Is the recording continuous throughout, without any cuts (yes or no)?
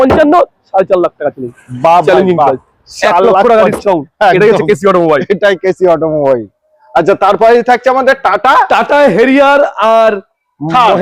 yes